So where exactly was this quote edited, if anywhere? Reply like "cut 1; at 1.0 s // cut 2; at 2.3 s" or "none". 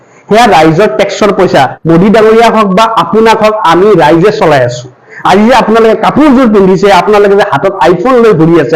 cut 1; at 1.8 s